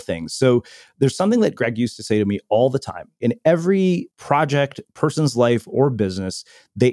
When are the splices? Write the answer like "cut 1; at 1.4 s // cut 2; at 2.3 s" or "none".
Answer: cut 1; at 3.2 s // cut 2; at 4.1 s